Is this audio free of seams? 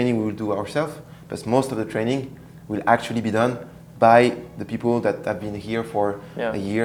yes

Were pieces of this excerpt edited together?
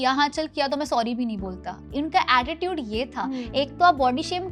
no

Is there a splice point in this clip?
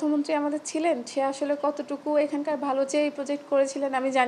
no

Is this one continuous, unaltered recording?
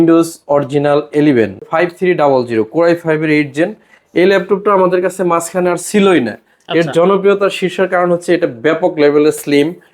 no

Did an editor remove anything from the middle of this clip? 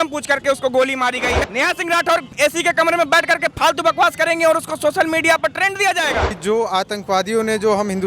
yes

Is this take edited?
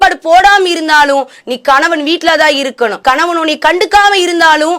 yes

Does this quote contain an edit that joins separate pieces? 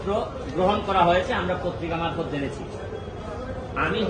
no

